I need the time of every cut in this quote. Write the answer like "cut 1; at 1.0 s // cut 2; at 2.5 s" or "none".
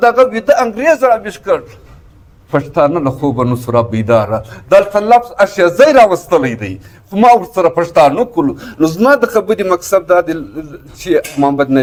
none